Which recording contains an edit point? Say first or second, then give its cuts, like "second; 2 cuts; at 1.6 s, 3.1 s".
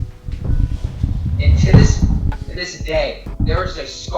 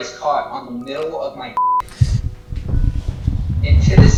first; 1 cut; at 3.3 s